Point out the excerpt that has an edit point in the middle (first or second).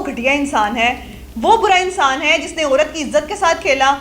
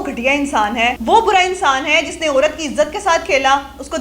second